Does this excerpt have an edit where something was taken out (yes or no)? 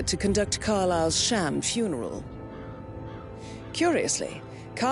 no